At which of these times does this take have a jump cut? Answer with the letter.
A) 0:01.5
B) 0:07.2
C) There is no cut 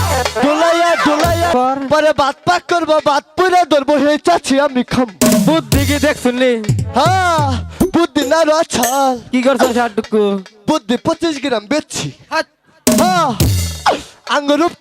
A